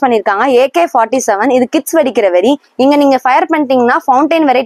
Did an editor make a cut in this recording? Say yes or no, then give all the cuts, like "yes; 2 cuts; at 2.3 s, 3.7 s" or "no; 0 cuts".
no; 0 cuts